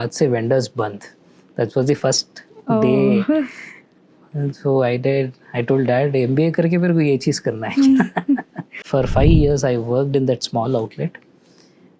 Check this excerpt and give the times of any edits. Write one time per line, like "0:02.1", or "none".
0:08.8